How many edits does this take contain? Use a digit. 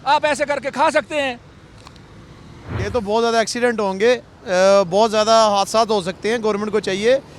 1